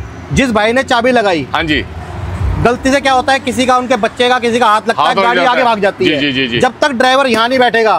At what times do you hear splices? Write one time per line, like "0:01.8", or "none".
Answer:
none